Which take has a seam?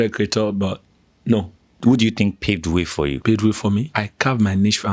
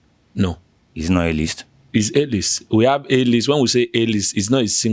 first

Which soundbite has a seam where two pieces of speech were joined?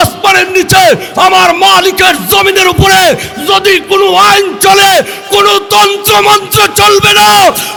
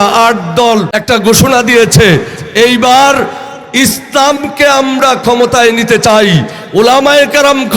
second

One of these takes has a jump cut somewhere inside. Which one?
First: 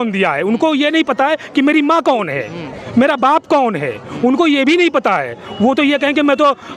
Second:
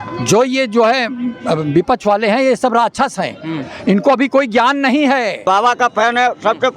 second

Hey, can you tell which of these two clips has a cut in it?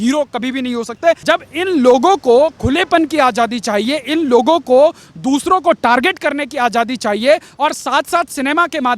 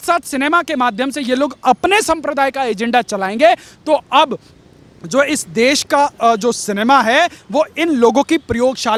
first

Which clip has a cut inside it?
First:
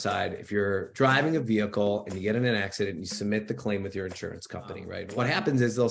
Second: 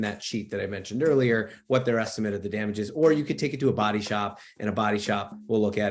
first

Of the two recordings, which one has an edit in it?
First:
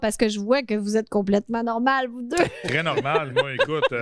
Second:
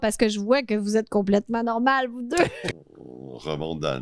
second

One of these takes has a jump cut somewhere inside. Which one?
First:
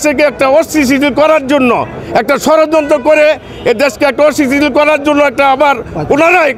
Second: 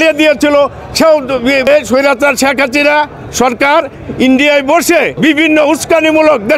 second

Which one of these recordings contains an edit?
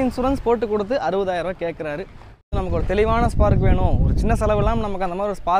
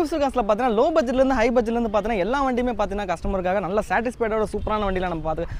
first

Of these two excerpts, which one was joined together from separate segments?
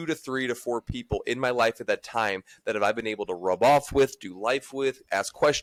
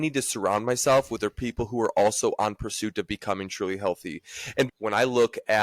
second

